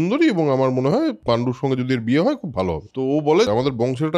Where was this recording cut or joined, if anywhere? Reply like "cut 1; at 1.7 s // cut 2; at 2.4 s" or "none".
cut 1; at 1.2 s // cut 2; at 3.3 s

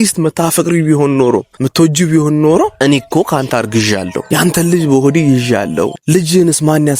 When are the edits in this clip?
cut 1; at 1.6 s // cut 2; at 2.8 s // cut 3; at 4.2 s // cut 4; at 6.0 s

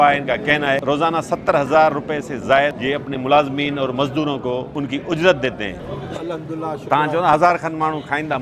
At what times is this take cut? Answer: cut 1; at 0.8 s // cut 2; at 2.8 s // cut 3; at 4.7 s // cut 4; at 5.8 s

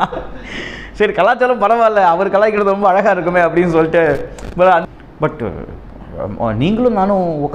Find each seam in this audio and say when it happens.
cut 1; at 4.8 s

